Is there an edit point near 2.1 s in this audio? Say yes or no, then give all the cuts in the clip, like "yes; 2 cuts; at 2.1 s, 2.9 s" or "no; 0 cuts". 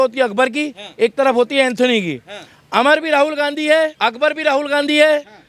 no; 1 cut; at 3.9 s